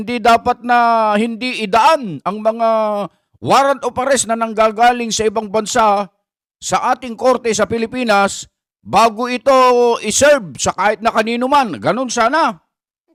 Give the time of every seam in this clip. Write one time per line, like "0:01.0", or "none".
none